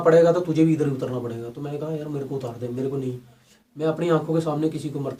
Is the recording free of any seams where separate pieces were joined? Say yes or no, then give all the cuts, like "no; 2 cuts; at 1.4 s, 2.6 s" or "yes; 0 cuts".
yes; 0 cuts